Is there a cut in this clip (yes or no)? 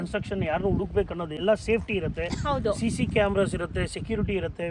yes